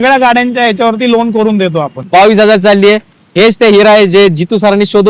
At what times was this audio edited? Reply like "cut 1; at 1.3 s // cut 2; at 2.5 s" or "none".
cut 1; at 2.1 s

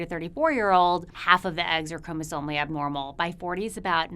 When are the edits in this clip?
cut 1; at 1.1 s

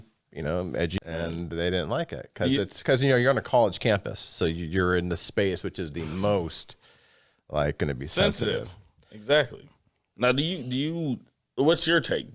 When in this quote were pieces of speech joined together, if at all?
cut 1; at 1.1 s

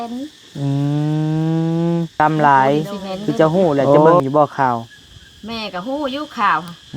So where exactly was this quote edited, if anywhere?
cut 1; at 2.1 s

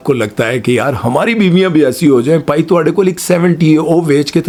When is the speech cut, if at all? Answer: none

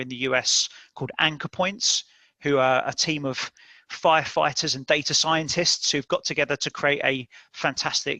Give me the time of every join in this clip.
none

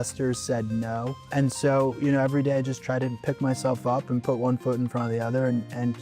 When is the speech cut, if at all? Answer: cut 1; at 1.2 s

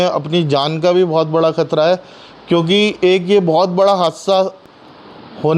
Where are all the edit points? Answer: none

